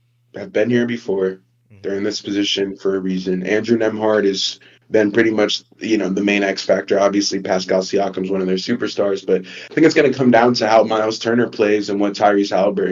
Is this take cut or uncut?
uncut